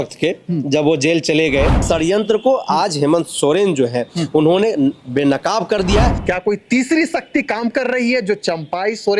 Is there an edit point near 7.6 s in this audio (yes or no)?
no